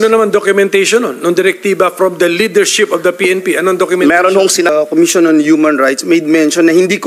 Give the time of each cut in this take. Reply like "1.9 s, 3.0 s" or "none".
4.7 s